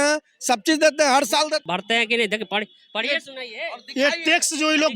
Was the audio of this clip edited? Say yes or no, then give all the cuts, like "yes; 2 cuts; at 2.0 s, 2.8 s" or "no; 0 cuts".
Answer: yes; 1 cut; at 1.6 s